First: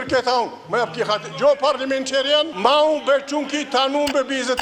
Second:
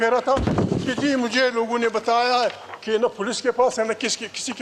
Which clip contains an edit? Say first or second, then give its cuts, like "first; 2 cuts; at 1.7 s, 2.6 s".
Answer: first; 1 cut; at 2.5 s